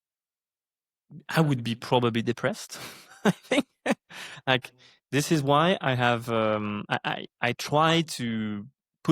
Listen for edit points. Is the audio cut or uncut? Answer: uncut